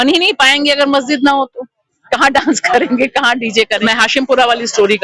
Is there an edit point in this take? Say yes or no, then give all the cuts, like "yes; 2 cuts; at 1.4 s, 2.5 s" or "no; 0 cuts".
yes; 1 cut; at 3.7 s